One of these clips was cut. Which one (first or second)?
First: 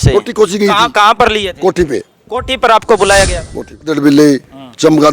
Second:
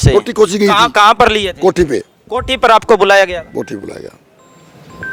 first